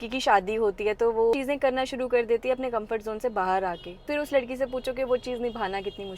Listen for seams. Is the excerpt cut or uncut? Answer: cut